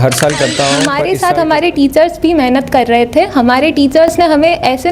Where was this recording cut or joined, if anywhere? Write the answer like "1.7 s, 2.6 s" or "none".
1.0 s